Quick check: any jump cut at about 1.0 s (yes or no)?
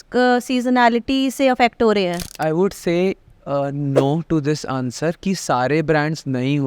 no